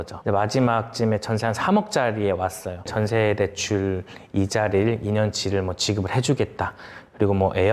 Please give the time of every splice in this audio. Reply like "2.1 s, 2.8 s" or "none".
2.7 s